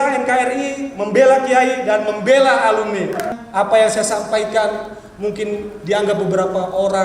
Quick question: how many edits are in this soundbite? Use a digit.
1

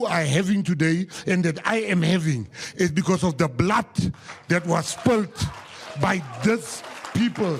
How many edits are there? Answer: 0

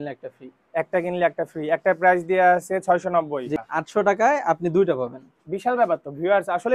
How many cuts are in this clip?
1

